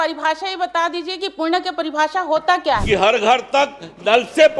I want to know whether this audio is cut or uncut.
cut